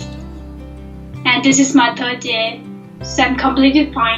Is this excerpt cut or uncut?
uncut